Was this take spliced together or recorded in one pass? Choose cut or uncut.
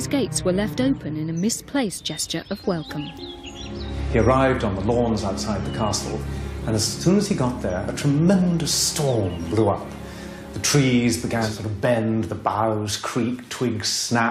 uncut